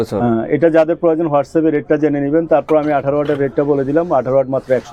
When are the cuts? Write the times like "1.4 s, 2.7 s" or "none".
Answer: none